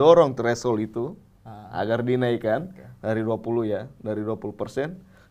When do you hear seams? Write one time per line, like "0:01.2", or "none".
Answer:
none

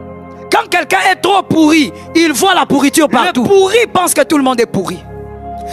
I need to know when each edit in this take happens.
0:03.5

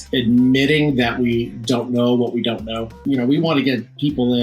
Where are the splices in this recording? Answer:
0:02.9

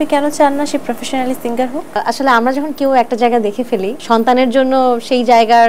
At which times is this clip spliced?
0:02.0
0:03.9

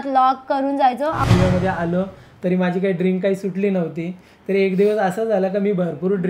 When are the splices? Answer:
0:01.2

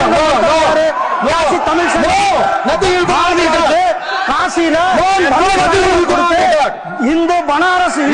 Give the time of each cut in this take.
none

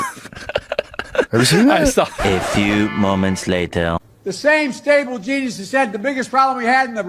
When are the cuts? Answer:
0:02.2

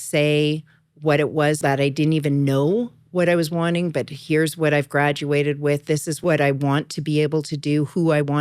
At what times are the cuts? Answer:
0:01.6
0:06.2

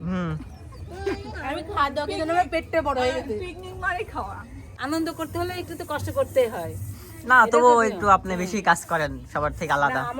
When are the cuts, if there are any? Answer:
0:04.7

